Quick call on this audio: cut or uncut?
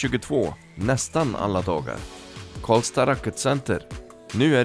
uncut